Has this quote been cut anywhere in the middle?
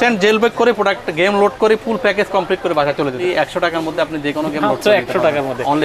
yes; 1 cut; at 3.2 s

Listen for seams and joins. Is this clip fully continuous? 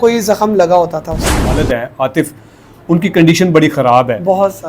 no; 1 cut; at 1.6 s

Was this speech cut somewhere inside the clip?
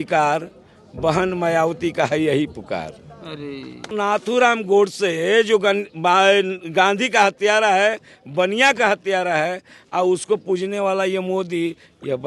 yes; 1 cut; at 3.9 s

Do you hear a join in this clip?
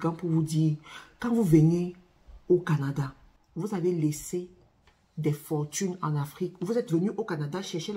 yes; 1 cut; at 3.3 s

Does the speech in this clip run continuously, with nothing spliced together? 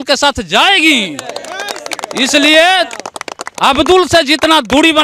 yes; 0 cuts

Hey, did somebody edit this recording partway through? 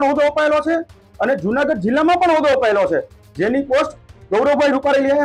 no; 0 cuts

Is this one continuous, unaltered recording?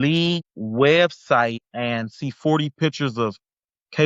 yes; 0 cuts

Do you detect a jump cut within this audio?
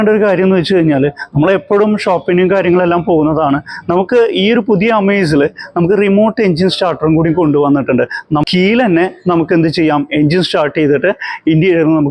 yes; 1 cut; at 8.4 s

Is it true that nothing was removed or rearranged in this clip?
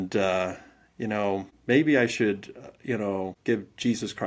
no; 2 cuts; at 1.5 s, 3.3 s

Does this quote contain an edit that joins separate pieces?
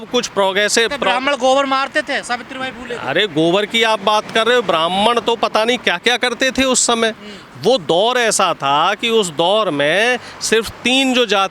no; 0 cuts

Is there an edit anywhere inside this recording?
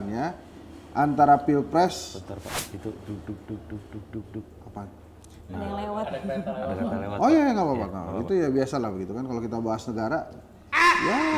no; 0 cuts

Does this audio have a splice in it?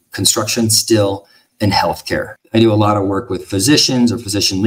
no; 0 cuts

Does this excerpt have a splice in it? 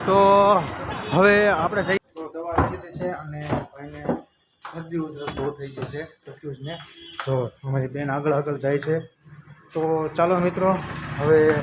yes; 1 cut; at 2.0 s

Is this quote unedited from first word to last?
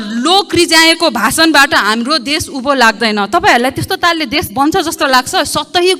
yes; 0 cuts

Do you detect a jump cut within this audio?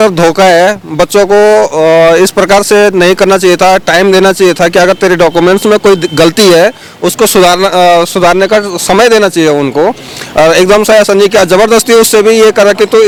no; 0 cuts

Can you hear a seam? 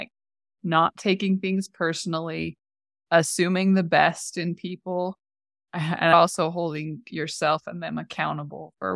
yes; 2 cuts; at 3.0 s, 6.1 s

